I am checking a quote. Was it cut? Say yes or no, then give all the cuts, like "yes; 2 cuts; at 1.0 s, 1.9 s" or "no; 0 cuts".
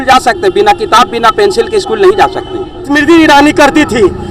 yes; 1 cut; at 2.9 s